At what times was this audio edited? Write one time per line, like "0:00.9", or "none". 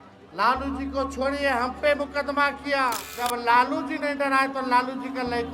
0:03.1